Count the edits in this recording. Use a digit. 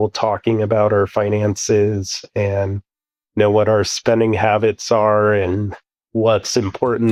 0